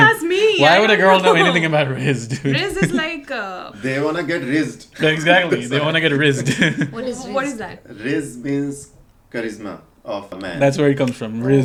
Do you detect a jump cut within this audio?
no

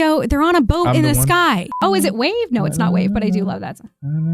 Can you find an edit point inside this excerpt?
yes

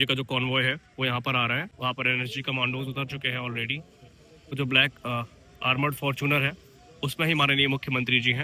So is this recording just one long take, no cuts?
no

